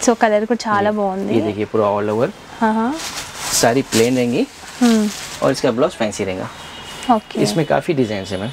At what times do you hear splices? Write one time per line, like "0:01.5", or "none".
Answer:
none